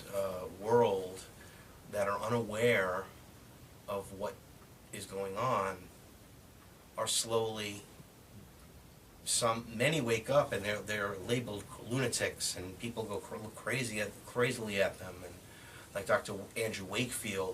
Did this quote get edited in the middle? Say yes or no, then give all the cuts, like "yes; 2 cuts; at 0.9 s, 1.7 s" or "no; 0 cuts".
yes; 1 cut; at 1.4 s